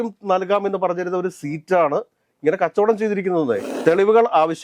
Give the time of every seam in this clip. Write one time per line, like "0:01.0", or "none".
0:03.7